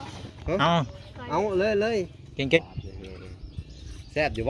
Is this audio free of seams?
no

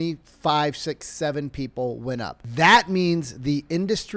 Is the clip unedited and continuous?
no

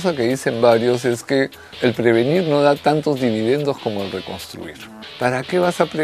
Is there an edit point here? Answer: yes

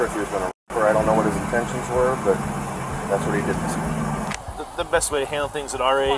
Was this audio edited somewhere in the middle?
yes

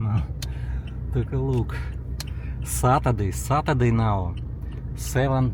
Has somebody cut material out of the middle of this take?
no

